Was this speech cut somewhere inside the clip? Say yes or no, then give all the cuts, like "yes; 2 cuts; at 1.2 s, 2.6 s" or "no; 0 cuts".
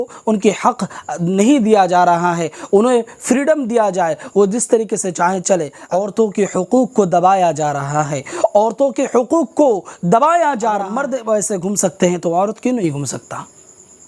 yes; 2 cuts; at 5.8 s, 10.9 s